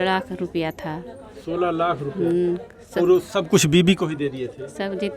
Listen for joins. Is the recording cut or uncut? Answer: uncut